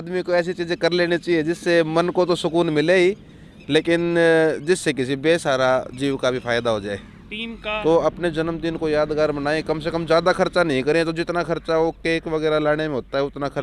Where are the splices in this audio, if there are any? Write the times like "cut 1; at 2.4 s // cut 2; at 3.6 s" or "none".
cut 1; at 7.8 s